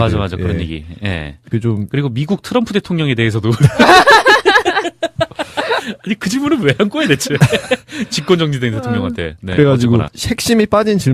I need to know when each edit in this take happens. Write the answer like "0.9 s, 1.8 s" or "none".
5.0 s